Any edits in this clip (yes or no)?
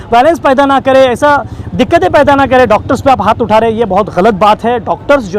no